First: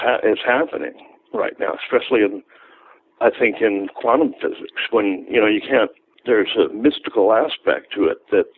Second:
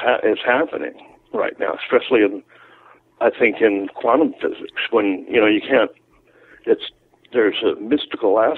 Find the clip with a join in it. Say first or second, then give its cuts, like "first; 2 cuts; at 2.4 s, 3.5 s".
first; 1 cut; at 6.1 s